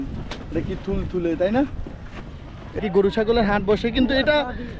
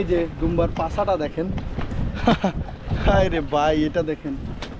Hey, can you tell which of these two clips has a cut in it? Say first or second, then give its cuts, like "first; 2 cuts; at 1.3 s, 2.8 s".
first; 1 cut; at 2.8 s